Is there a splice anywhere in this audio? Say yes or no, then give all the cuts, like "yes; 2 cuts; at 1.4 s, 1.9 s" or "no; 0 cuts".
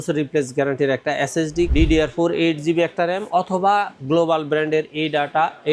yes; 1 cut; at 1.7 s